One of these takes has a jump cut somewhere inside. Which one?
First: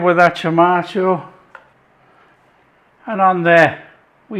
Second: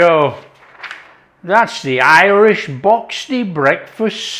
first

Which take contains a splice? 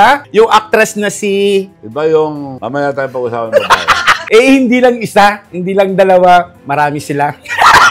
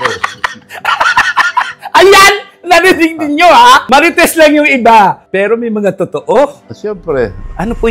first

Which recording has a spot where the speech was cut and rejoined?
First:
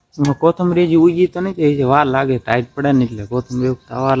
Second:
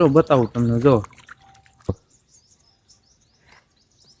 second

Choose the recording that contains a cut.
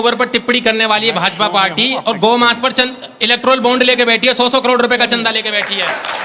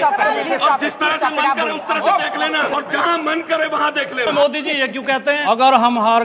second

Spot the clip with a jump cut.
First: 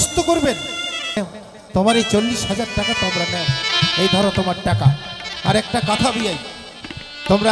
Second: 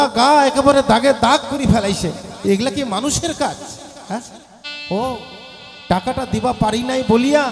first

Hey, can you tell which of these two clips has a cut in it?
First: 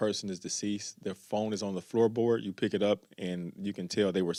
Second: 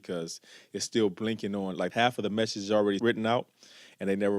second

